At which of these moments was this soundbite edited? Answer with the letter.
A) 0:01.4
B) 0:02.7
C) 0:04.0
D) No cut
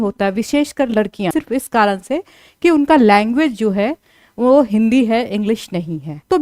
A